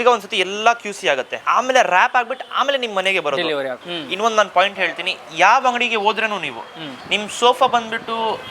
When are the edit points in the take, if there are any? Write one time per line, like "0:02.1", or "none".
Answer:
0:01.4
0:03.8

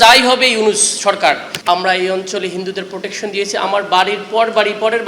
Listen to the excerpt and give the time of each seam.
0:01.5

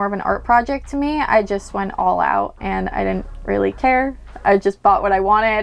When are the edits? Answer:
none

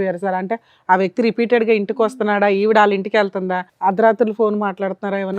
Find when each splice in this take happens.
0:03.6

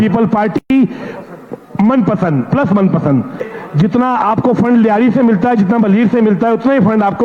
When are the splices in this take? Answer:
0:03.5

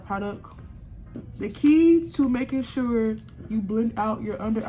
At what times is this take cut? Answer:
0:01.3

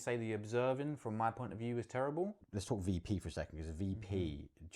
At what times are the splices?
0:02.5

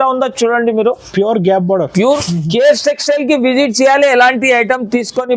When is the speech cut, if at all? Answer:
0:02.2

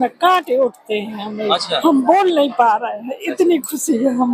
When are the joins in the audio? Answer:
0:01.8

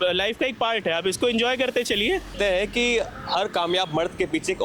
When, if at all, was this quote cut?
0:02.3

